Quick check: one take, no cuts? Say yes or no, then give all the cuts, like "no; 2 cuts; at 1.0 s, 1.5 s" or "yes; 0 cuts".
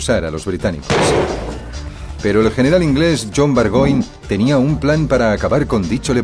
yes; 0 cuts